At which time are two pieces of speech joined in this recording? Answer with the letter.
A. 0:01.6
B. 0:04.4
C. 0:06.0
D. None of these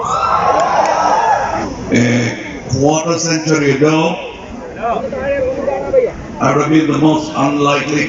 A